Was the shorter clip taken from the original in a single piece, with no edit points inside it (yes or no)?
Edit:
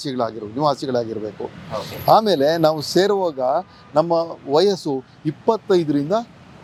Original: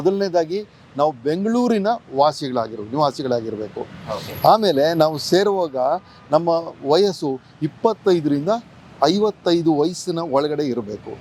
yes